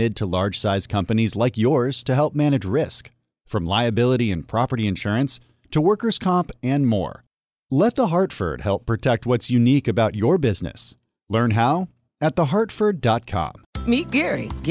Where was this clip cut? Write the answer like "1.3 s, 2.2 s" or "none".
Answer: 13.6 s